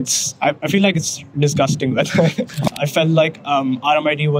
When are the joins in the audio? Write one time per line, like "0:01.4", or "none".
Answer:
0:02.6